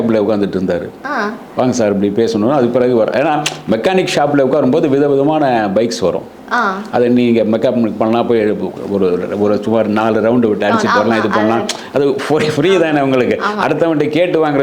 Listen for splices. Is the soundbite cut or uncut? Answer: uncut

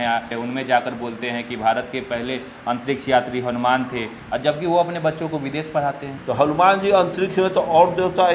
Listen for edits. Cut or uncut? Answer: cut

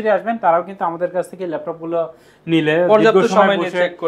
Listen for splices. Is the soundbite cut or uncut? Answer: uncut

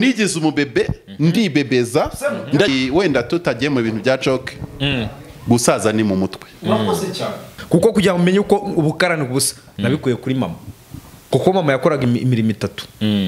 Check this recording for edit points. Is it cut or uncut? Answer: cut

